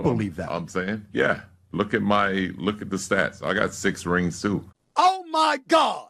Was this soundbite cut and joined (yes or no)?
yes